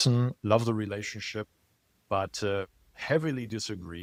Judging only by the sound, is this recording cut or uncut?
uncut